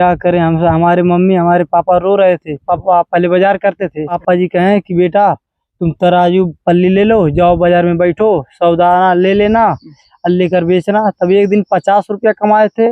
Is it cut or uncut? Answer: cut